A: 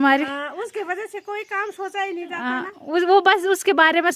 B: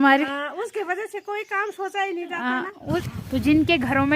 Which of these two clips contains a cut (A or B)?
B